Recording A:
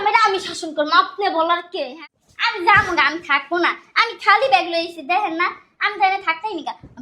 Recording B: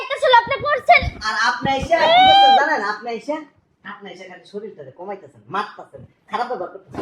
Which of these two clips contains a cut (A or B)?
A